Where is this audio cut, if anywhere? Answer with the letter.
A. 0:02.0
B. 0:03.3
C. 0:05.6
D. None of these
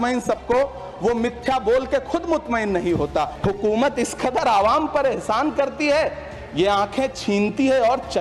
B